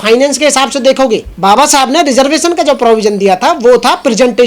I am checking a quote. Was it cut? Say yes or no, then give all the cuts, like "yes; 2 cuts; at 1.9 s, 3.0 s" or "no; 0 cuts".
yes; 1 cut; at 1.3 s